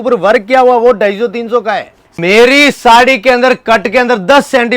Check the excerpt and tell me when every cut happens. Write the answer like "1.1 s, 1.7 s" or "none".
2.2 s